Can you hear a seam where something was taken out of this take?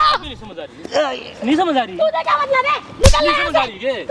no; 0 cuts

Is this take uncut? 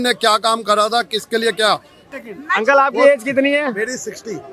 no; 1 cut; at 2.1 s

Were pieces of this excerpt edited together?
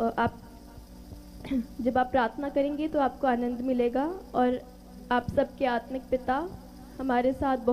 no; 0 cuts

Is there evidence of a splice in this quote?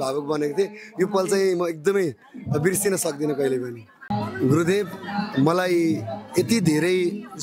yes; 1 cut; at 4.0 s

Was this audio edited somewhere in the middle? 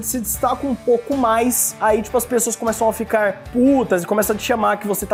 no; 0 cuts

